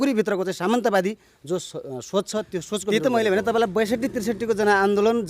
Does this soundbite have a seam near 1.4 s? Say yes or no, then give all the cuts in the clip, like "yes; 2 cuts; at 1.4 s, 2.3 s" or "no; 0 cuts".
no; 1 cut; at 2.9 s